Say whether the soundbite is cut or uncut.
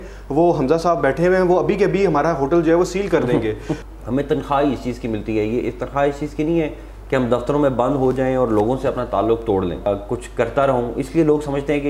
cut